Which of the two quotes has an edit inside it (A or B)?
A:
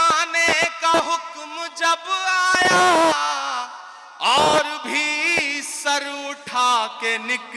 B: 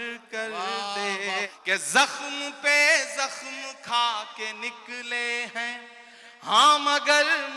B